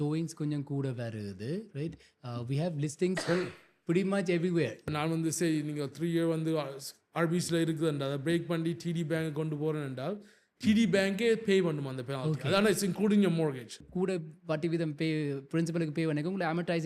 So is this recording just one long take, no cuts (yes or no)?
no